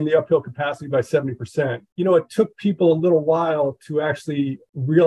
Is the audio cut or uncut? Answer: uncut